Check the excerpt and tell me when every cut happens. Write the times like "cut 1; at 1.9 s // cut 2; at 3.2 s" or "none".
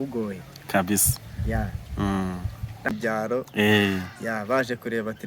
cut 1; at 2.8 s